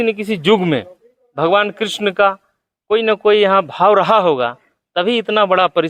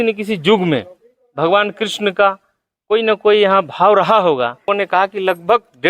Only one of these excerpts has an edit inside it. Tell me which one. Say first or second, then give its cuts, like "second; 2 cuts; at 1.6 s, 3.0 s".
second; 1 cut; at 4.7 s